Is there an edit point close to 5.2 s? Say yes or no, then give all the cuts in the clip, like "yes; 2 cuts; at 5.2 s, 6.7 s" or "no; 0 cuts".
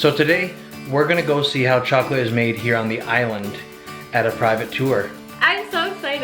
yes; 1 cut; at 5.2 s